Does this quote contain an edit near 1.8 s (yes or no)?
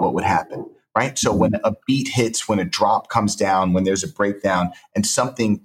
no